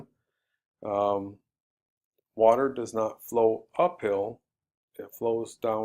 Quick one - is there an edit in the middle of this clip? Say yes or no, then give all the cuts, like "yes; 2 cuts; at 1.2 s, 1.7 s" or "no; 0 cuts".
yes; 1 cut; at 1.3 s